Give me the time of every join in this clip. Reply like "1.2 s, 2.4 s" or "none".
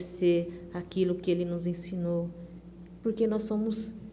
none